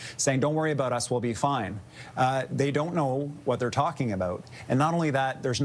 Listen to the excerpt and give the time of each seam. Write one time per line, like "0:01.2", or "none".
none